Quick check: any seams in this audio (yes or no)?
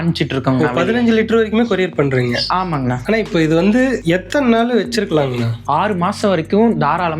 yes